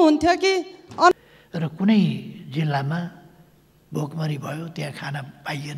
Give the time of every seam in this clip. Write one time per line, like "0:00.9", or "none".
0:01.1